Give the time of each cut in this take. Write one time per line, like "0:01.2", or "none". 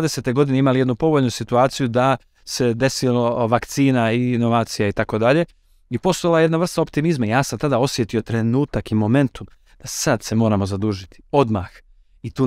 none